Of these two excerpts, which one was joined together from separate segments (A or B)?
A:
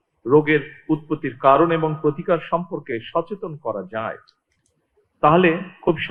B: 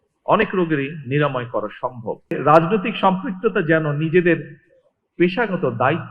B